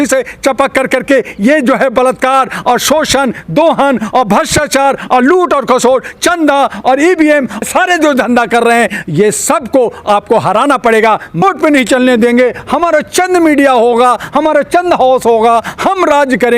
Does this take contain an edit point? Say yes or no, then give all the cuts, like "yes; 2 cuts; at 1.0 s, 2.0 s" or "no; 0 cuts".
yes; 2 cuts; at 7.6 s, 11.4 s